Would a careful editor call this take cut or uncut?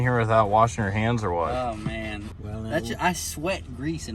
cut